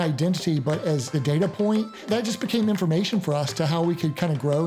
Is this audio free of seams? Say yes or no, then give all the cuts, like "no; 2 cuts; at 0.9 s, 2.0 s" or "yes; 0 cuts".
no; 2 cuts; at 1.1 s, 2.1 s